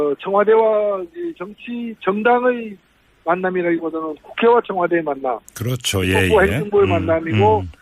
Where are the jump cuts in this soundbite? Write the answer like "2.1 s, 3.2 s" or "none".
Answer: 6.8 s

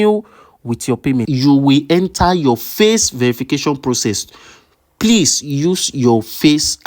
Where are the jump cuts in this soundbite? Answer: 1.3 s

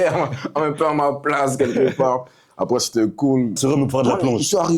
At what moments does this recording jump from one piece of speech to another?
3.6 s

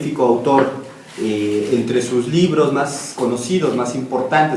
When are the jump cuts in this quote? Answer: 2.9 s

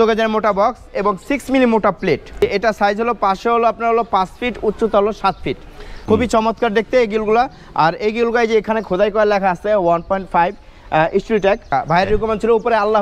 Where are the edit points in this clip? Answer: 2.4 s, 5.9 s, 11.7 s

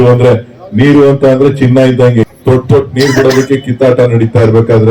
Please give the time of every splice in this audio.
2.2 s

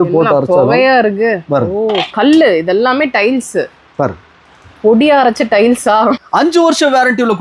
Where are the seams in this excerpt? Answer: 6.2 s

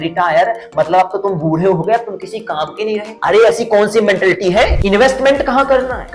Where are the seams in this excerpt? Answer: 4.8 s

